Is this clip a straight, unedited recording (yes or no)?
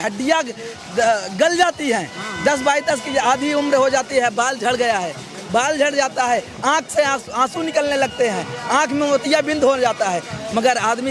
yes